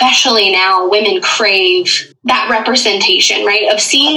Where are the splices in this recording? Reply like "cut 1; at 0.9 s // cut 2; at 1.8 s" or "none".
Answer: cut 1; at 2.0 s